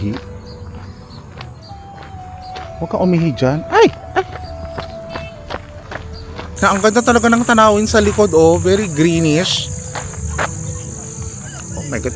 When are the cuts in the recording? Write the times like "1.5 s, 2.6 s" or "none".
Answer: 6.6 s